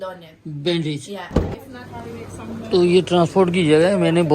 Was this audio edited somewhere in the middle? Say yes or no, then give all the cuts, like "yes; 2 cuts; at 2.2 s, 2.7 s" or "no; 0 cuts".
yes; 1 cut; at 1.7 s